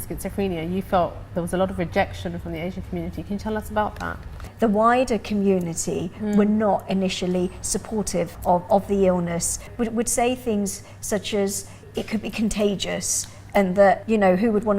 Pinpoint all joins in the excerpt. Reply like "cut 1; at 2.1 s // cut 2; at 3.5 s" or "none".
cut 1; at 4.5 s // cut 2; at 8.4 s // cut 3; at 9.7 s // cut 4; at 11.8 s // cut 5; at 14.0 s